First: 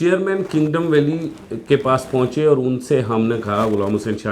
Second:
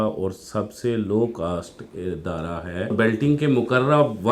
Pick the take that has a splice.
second; 1 cut; at 2.9 s

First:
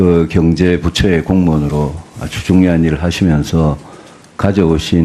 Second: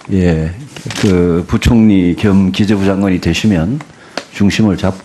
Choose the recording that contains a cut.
first; 1 cut; at 1.4 s

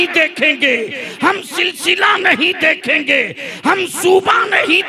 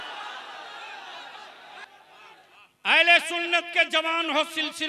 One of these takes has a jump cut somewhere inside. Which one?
second; 1 cut; at 1.8 s

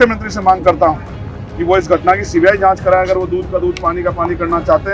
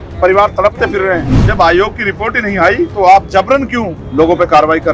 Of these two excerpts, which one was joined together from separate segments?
second; 3 cuts; at 1.5 s, 2.9 s, 4.0 s

